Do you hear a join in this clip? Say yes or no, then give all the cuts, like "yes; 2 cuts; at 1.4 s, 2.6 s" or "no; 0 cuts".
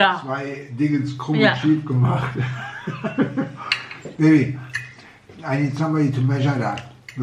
no; 0 cuts